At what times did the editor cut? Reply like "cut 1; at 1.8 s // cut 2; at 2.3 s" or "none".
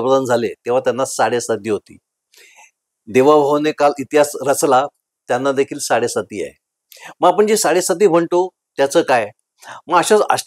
none